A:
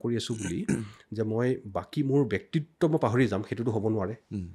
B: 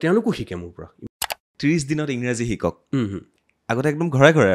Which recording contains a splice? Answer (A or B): B